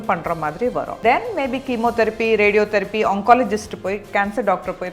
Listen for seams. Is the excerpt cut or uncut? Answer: cut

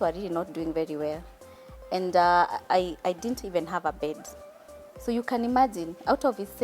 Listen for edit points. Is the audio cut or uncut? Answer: uncut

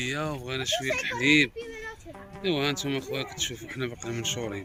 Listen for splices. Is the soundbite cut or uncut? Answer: uncut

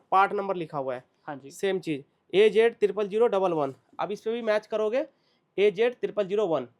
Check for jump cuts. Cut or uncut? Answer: uncut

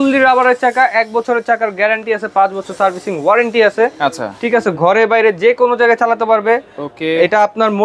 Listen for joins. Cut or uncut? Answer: uncut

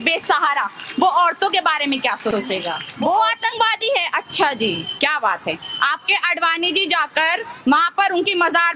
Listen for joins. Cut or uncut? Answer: cut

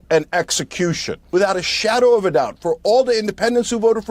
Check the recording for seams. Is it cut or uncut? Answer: cut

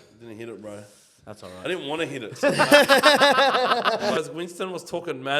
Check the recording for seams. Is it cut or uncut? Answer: cut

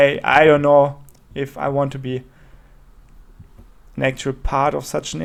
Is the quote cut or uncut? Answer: uncut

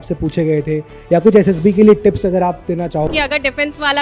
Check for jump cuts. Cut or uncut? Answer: cut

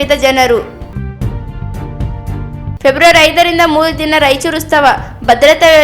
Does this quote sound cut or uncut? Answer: cut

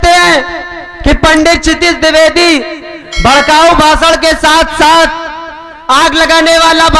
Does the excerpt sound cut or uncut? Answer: uncut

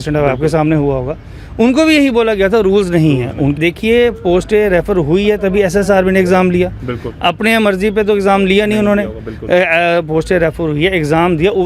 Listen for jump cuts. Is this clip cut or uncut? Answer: cut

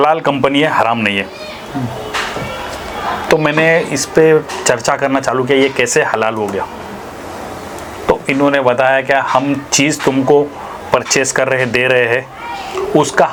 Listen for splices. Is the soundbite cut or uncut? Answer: uncut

